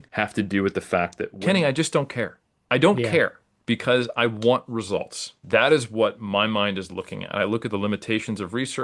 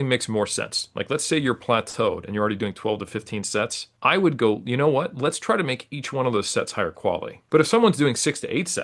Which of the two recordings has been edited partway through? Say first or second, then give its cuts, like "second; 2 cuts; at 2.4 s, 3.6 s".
first; 3 cuts; at 1.3 s, 3.5 s, 5.4 s